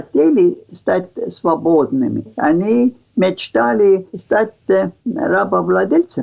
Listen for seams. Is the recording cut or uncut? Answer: cut